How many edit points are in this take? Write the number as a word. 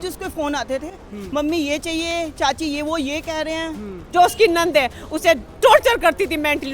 one